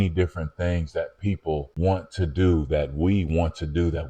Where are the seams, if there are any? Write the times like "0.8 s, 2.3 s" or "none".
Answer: none